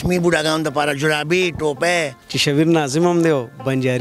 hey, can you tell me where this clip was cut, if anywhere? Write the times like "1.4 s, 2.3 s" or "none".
2.2 s